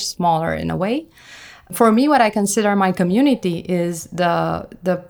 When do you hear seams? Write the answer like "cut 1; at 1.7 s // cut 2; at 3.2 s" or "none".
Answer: cut 1; at 1.7 s